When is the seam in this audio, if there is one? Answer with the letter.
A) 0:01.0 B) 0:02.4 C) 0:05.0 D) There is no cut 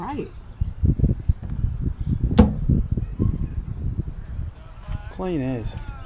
D